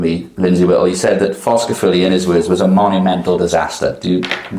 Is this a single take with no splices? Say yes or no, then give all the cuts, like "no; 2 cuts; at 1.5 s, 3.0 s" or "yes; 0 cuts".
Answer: yes; 0 cuts